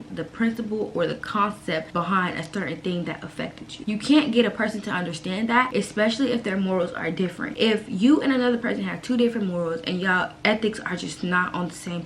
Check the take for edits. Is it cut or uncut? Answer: cut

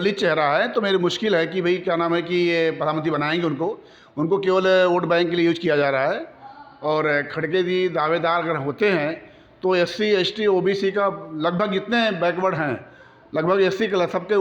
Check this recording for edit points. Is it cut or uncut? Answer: uncut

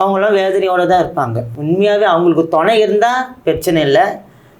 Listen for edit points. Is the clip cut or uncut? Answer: uncut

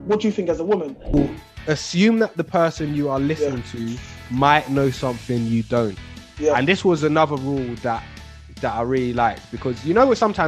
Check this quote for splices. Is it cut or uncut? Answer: cut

